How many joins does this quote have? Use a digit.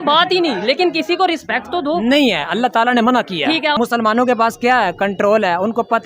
0